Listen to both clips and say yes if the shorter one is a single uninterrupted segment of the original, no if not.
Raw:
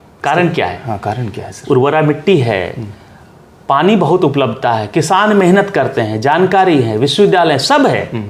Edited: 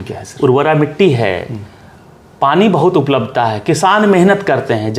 yes